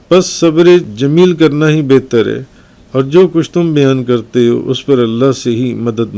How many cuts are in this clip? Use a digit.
1